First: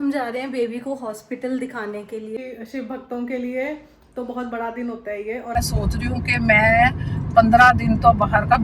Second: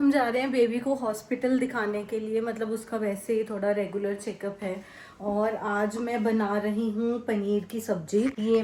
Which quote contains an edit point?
first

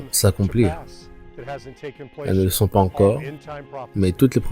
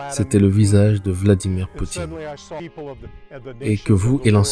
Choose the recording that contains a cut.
second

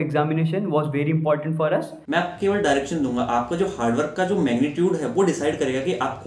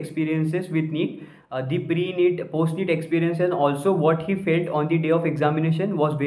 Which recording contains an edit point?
first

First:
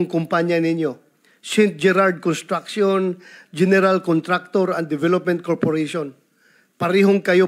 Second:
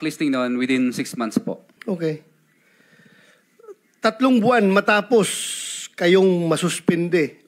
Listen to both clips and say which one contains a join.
second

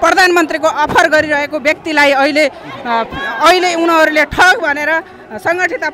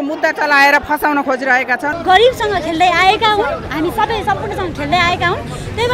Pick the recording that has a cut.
second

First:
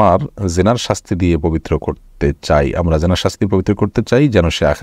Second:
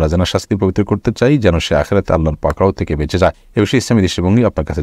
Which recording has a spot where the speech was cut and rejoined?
second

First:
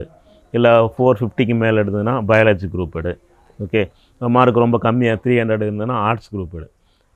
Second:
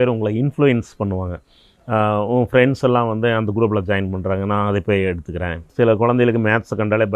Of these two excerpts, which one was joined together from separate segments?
second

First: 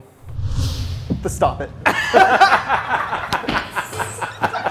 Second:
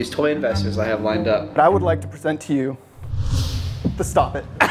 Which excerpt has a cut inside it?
second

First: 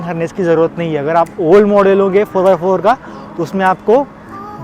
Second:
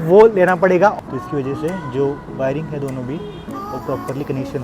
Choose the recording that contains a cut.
second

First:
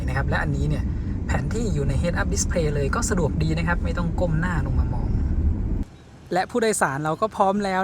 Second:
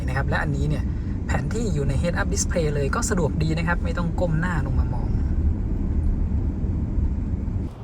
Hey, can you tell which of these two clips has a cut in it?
first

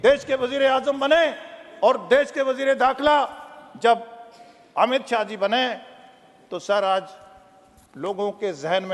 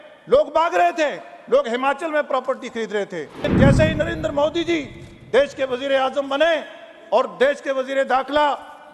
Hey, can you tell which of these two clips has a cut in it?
second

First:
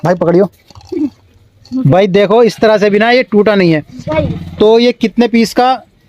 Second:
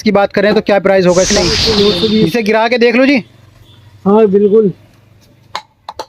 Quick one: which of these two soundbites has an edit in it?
second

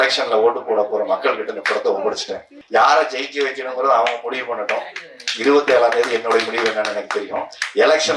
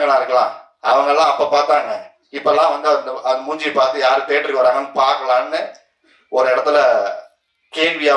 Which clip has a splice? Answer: first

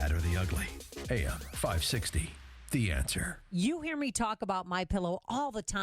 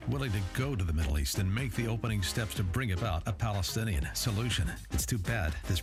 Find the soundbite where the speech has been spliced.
first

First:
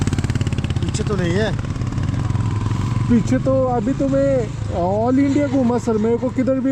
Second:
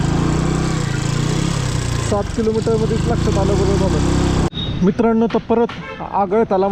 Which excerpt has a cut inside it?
second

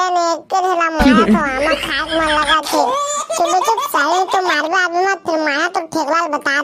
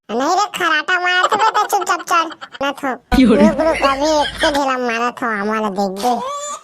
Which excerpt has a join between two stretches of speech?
second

